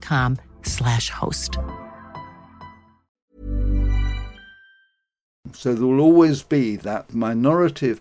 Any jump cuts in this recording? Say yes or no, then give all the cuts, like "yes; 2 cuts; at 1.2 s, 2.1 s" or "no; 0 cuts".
yes; 2 cuts; at 5.4 s, 7.1 s